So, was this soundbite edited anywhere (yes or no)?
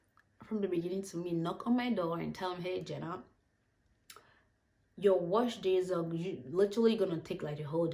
no